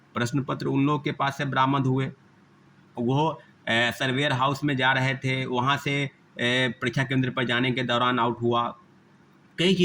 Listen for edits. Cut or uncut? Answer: uncut